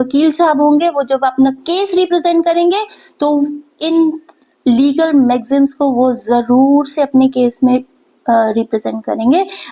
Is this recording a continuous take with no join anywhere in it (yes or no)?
yes